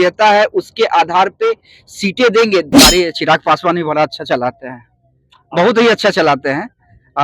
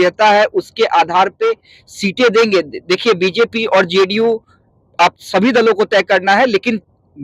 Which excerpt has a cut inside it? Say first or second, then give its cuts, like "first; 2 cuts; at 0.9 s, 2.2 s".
first; 1 cut; at 2.8 s